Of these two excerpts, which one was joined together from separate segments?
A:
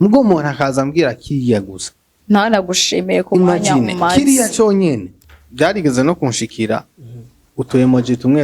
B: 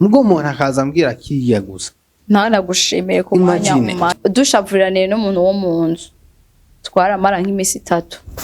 B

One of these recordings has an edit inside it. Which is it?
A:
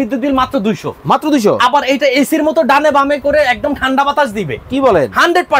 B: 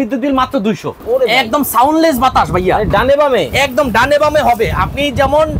B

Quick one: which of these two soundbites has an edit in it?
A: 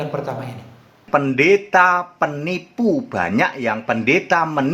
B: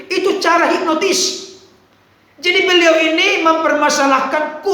A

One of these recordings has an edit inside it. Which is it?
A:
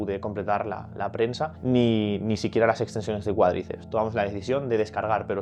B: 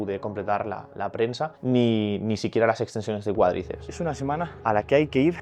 B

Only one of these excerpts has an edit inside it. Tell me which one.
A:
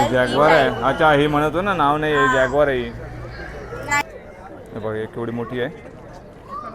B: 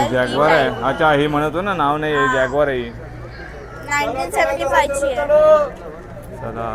A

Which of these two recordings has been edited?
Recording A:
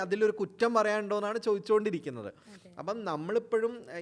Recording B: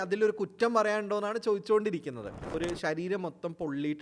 B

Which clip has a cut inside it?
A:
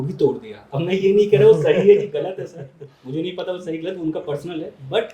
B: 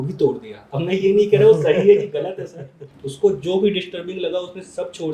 B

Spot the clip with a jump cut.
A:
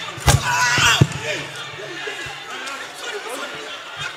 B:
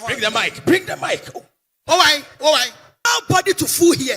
B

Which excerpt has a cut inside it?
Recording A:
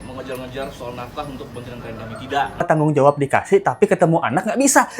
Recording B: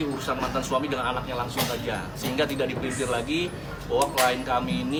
A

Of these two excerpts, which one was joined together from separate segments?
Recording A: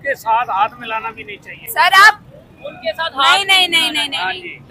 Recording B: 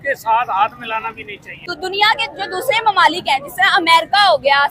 B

